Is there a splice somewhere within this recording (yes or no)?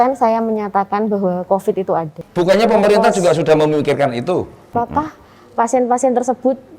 yes